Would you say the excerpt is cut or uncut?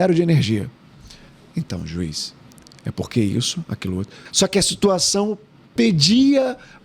cut